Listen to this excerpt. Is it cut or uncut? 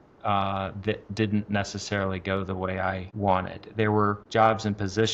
cut